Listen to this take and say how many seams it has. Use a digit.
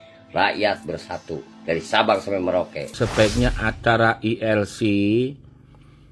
1